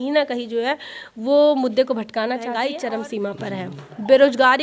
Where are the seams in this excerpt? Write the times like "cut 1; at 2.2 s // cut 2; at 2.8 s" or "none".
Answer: cut 1; at 2.5 s